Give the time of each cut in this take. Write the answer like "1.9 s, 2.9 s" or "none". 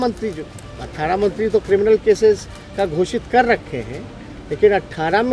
none

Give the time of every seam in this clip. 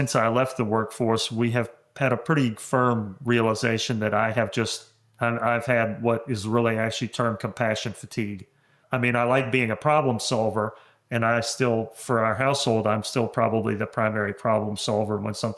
8.8 s

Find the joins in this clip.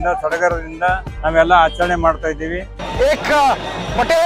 1.1 s, 2.8 s

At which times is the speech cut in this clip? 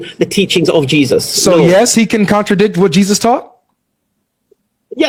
none

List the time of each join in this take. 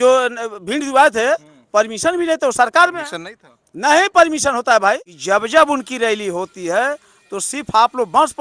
5.1 s

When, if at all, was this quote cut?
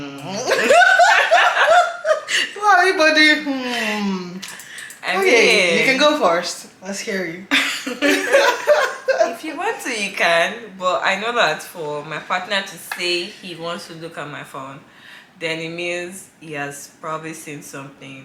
none

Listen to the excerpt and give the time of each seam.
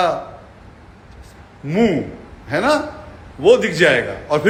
none

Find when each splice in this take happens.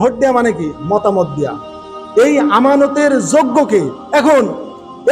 4.0 s

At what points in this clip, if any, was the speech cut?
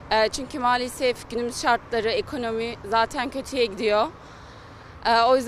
none

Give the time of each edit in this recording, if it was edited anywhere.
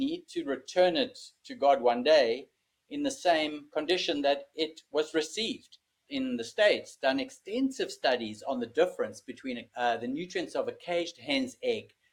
6.0 s, 9.6 s

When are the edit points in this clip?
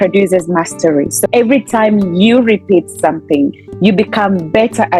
1.1 s

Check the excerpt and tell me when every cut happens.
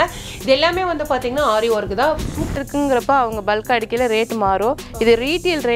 2.5 s

